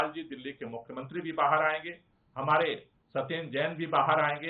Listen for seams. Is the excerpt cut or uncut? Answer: uncut